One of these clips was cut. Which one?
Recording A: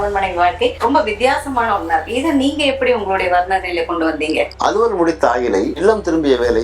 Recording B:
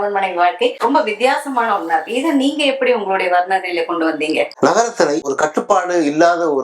A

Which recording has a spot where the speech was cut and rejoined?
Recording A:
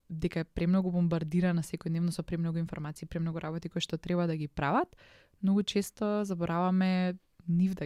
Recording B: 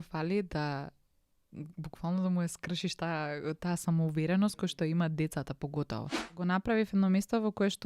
B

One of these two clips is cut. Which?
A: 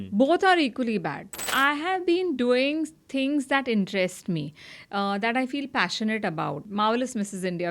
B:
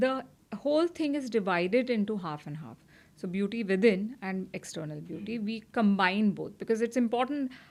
A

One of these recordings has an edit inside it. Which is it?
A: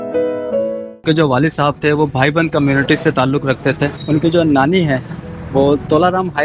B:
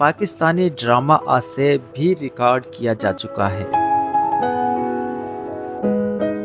A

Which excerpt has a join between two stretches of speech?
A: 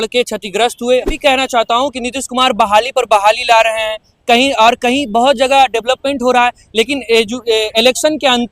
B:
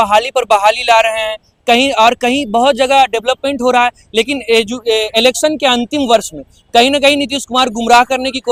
A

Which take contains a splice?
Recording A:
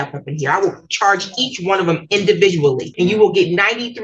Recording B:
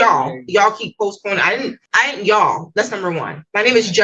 A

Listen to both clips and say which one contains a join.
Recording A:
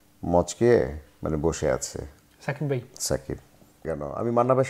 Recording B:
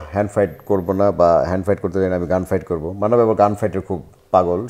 A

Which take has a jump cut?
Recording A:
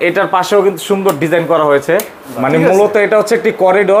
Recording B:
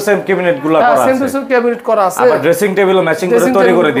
A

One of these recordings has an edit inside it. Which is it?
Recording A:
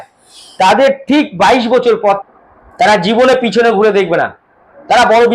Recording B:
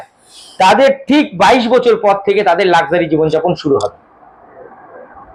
A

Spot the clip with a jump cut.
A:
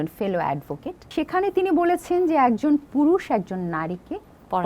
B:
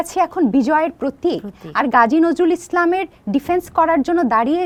A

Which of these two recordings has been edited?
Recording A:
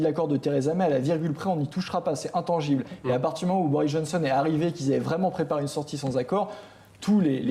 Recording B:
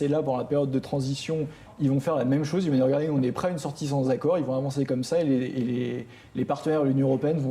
B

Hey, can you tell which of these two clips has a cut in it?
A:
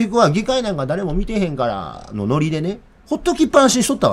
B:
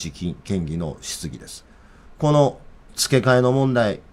A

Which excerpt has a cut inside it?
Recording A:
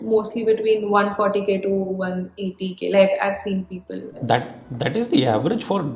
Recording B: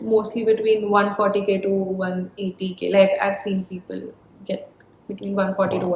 A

